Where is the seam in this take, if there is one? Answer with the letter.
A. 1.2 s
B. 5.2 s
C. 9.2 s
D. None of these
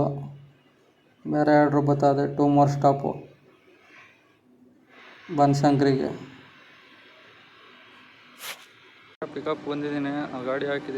C